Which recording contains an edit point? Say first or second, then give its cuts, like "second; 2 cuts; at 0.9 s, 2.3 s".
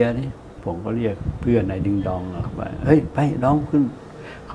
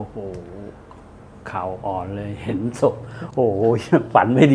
first; 1 cut; at 1.0 s